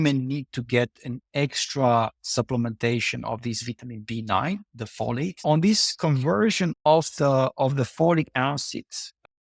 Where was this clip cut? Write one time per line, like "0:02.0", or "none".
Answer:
0:05.4